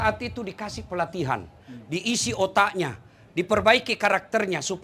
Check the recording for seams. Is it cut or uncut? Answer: uncut